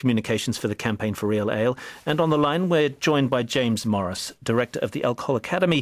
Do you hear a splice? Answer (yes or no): no